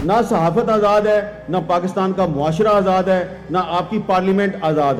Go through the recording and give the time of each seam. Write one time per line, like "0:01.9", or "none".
none